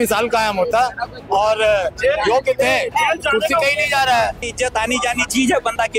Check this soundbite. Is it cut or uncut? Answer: cut